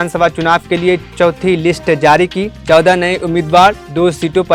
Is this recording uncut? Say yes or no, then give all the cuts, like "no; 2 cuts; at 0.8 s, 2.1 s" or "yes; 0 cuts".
yes; 0 cuts